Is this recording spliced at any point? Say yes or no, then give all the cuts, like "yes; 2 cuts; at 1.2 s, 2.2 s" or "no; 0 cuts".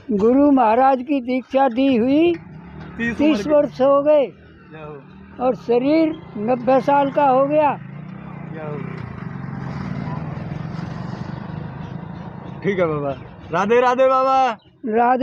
no; 0 cuts